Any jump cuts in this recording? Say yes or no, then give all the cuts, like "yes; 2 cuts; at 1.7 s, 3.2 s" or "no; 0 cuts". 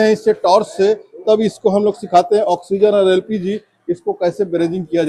no; 0 cuts